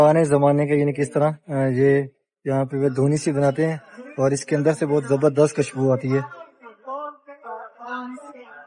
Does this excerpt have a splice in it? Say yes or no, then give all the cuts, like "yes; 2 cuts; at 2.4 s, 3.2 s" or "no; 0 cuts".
no; 0 cuts